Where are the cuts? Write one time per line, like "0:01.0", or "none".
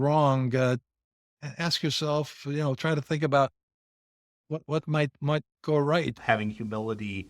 0:06.2